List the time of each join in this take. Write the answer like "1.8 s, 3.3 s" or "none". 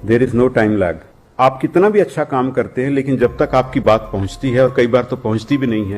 1.2 s